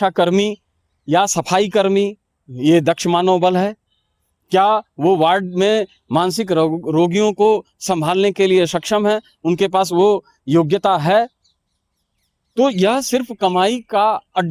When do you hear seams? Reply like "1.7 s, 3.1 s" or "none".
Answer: none